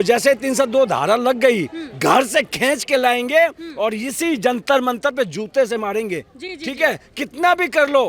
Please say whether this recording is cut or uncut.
uncut